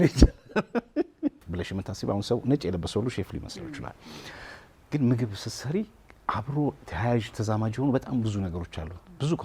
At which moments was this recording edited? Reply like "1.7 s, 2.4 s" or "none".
1.4 s